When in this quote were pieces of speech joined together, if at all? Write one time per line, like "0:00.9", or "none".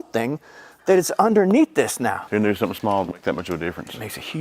0:02.2

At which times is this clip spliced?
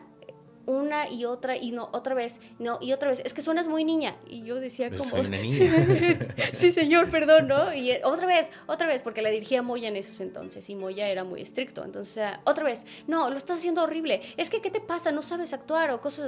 none

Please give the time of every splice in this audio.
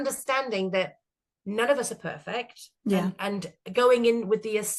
none

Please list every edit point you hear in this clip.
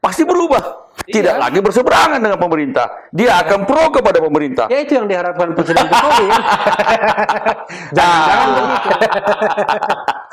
0:08.7

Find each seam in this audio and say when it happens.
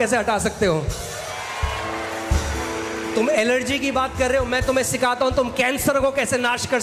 none

